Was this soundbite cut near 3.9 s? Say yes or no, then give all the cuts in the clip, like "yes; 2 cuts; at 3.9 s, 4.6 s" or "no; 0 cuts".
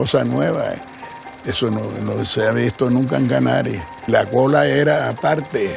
yes; 1 cut; at 3.9 s